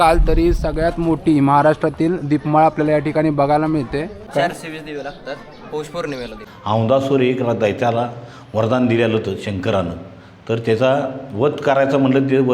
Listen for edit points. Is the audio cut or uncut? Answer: cut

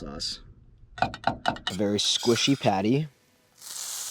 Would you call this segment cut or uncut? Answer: cut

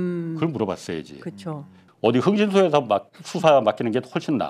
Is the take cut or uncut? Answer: cut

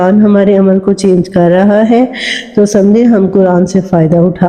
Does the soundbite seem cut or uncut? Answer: uncut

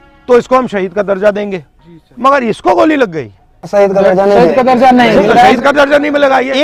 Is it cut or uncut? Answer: uncut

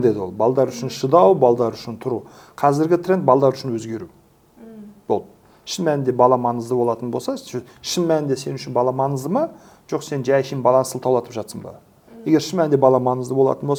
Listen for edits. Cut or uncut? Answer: uncut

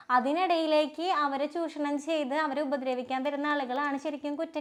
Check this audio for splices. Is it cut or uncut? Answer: uncut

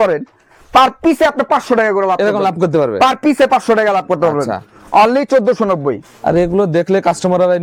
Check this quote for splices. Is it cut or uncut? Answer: uncut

